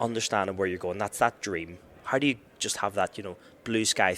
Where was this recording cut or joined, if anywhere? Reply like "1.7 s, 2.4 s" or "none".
none